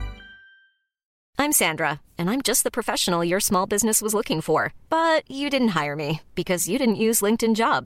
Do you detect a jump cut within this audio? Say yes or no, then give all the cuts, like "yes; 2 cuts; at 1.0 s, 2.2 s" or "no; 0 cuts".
yes; 1 cut; at 1.1 s